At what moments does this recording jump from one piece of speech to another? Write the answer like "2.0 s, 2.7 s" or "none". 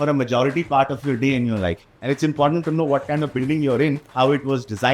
1.9 s, 4.0 s